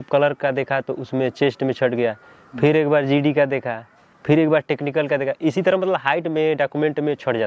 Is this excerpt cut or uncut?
uncut